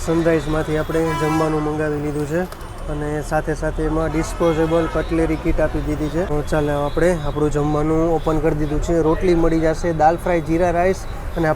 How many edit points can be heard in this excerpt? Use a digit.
1